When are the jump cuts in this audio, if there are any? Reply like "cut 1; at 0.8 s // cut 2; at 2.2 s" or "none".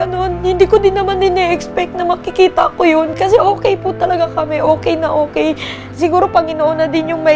cut 1; at 3.1 s // cut 2; at 5.8 s